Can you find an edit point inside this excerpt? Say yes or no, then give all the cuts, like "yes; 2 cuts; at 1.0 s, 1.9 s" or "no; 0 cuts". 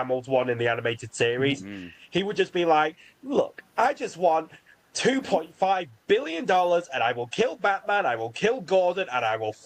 no; 0 cuts